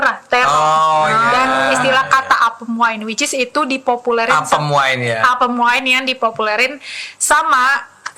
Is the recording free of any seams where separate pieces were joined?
yes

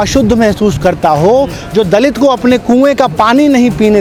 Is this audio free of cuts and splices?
yes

